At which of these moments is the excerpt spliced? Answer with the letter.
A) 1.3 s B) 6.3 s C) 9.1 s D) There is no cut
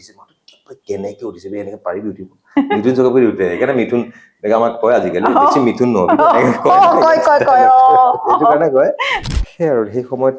C